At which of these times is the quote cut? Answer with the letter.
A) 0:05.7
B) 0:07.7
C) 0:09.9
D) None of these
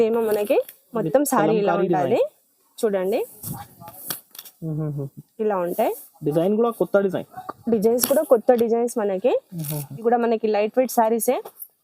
C